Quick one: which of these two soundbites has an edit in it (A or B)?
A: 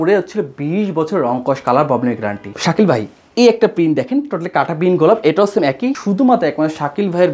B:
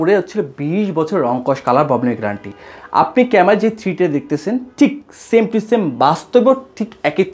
A